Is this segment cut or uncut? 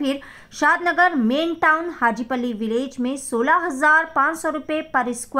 uncut